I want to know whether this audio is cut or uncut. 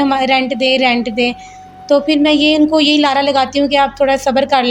uncut